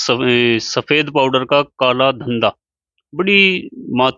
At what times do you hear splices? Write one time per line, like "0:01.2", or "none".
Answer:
none